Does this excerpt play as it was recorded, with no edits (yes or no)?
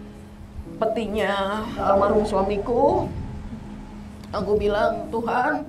no